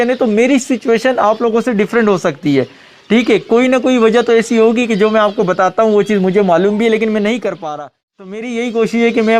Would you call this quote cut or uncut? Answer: cut